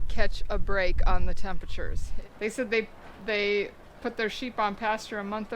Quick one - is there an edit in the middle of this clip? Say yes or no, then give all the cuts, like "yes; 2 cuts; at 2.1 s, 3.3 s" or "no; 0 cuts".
yes; 1 cut; at 2.0 s